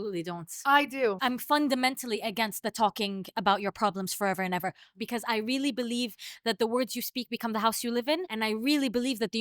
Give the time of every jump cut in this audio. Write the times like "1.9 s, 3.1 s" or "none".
1.2 s, 4.9 s, 8.3 s

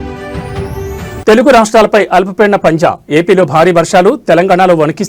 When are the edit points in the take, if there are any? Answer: 1.2 s

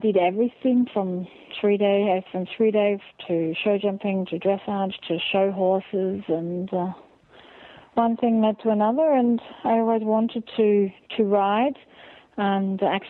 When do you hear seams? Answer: none

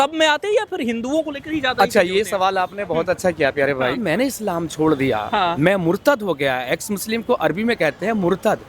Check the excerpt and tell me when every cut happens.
4.0 s, 5.6 s

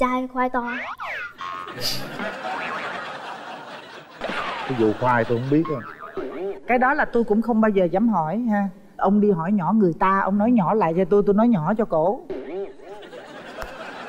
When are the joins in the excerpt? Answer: 4.2 s

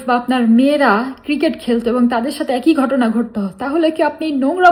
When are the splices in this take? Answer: none

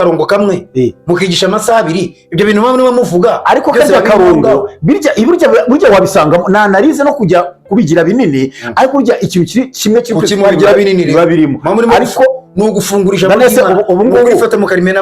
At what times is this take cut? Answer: none

